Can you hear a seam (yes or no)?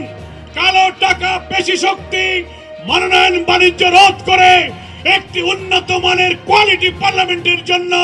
no